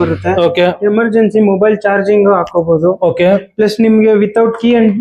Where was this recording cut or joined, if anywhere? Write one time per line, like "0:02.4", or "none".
none